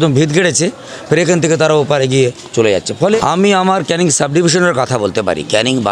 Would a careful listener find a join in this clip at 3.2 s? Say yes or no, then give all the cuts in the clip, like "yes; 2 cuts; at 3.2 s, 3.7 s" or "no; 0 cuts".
yes; 1 cut; at 3.2 s